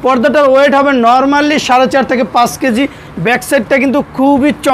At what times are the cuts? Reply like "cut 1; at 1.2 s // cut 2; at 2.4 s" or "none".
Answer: none